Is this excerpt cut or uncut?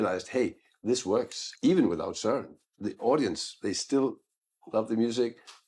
uncut